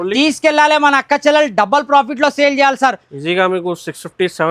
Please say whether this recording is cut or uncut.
uncut